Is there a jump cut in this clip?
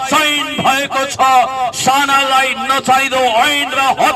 no; 0 cuts

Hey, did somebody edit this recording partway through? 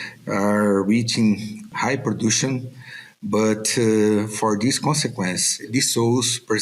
yes; 2 cuts; at 1.7 s, 5.6 s

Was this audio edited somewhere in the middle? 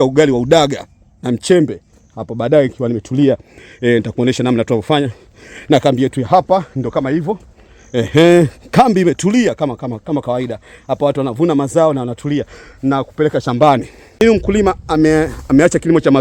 yes; 1 cut; at 14.1 s

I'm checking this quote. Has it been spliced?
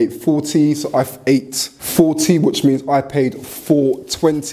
no; 0 cuts

